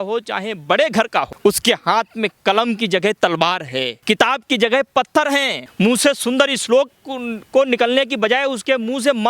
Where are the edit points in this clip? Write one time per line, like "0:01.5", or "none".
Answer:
0:01.3
0:04.0
0:05.6